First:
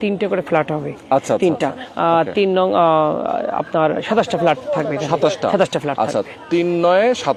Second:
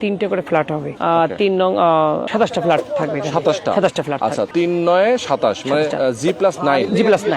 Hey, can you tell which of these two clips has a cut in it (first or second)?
second